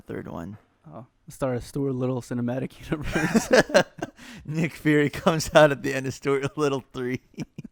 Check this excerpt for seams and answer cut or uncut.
uncut